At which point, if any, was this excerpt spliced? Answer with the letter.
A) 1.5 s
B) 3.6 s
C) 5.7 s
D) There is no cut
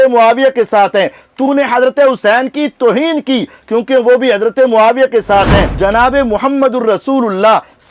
C